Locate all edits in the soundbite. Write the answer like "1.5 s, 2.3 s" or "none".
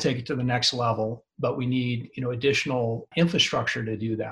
3.1 s